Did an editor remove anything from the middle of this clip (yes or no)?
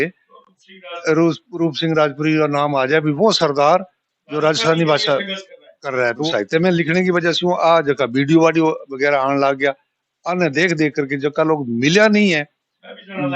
yes